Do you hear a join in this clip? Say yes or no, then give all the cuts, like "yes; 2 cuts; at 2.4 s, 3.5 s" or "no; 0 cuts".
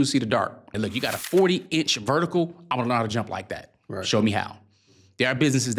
yes; 1 cut; at 1.0 s